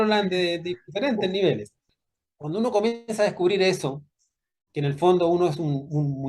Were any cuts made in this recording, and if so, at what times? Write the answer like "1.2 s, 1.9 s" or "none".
1.7 s

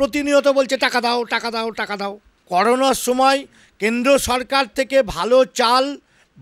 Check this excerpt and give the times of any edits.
2.3 s

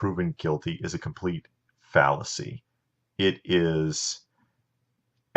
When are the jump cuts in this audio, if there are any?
3.7 s

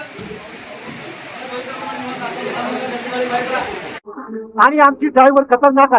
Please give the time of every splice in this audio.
3.9 s

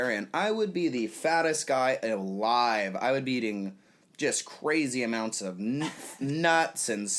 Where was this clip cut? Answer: none

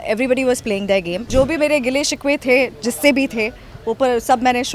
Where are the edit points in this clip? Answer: 1.3 s

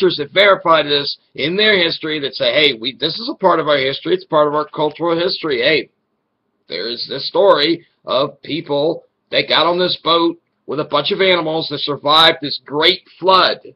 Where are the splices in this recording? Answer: 5.4 s

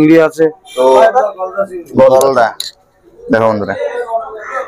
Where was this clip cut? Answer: 1.0 s

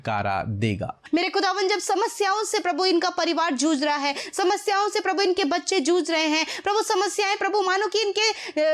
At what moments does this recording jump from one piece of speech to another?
1.0 s

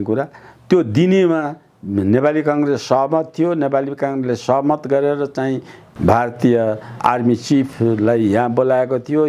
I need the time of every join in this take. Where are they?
5.8 s, 7.0 s

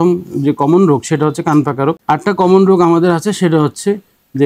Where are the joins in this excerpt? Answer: 2.0 s

